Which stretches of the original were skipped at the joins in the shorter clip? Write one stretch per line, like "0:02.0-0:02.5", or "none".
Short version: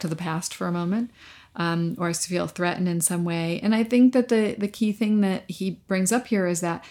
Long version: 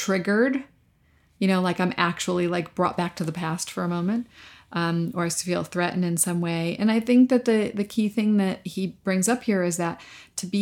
none